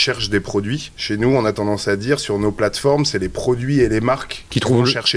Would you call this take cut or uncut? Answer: cut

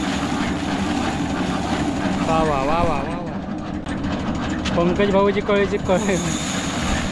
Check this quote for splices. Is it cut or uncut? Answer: cut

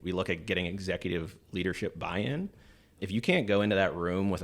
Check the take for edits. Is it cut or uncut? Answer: cut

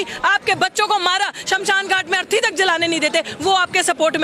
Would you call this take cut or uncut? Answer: uncut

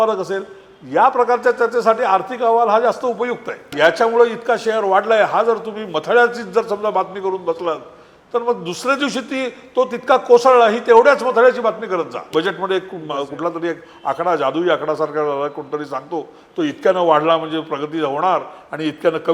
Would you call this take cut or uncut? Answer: cut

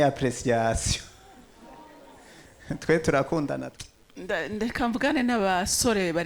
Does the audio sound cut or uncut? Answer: cut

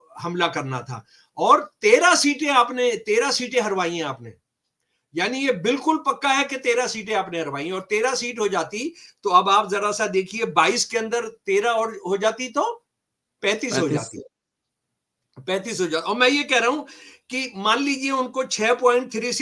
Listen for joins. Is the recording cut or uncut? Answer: uncut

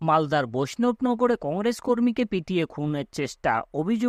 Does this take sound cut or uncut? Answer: uncut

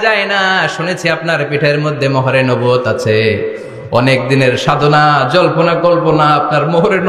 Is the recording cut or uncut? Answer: uncut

